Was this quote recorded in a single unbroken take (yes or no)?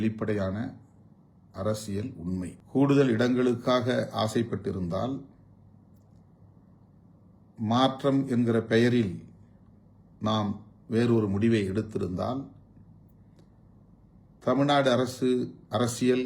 no